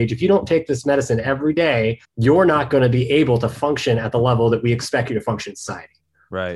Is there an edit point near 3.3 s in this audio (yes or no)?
no